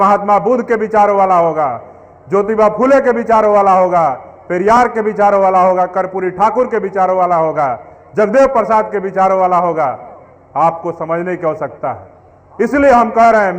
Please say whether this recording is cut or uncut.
uncut